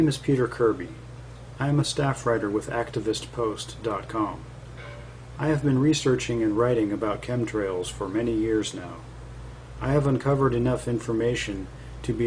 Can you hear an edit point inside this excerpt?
no; 0 cuts

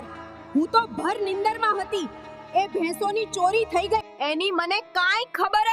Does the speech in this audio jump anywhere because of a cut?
yes; 1 cut; at 4.1 s

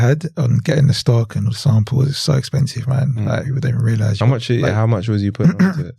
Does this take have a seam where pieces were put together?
no; 0 cuts

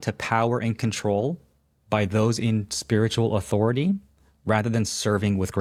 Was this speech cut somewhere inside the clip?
no; 0 cuts

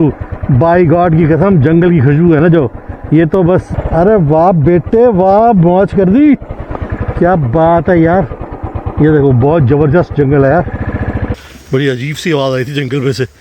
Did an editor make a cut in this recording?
yes; 2 cuts; at 3.7 s, 11.3 s

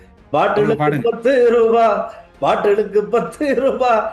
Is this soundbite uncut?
yes; 0 cuts

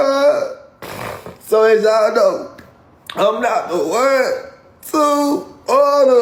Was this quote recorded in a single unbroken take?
yes; 0 cuts

